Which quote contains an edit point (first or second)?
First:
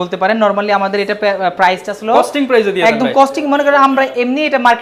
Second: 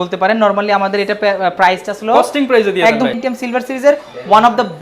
second